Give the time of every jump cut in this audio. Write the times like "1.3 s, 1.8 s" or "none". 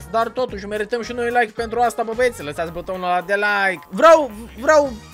3.8 s